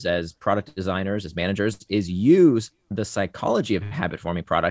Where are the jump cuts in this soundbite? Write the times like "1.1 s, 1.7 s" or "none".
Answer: none